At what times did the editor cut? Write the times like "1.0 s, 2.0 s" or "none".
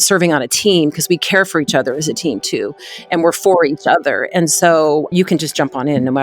5.1 s

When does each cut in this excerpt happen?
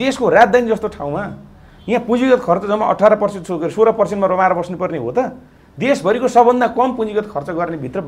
none

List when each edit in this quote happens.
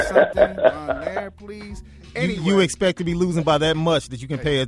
none

